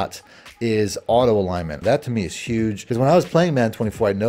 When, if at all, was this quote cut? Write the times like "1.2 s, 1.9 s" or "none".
1.7 s, 2.8 s